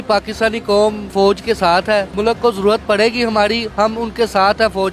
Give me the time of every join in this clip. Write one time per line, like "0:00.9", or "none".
0:01.1
0:02.1